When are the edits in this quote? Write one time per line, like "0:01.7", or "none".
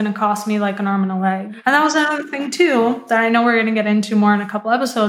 0:01.5